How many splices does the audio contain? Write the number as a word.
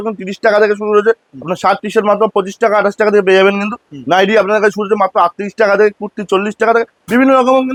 zero